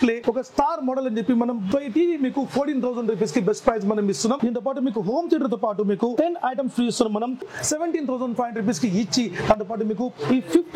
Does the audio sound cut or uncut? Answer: cut